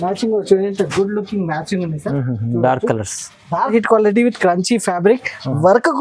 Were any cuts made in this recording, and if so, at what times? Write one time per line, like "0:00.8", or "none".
0:03.7